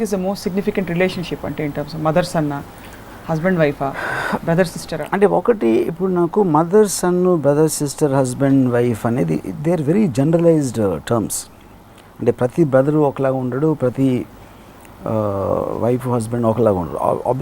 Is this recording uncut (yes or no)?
yes